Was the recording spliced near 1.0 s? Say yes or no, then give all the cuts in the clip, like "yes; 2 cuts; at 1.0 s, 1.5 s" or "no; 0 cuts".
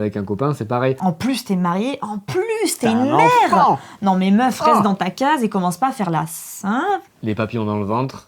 yes; 2 cuts; at 1.0 s, 7.1 s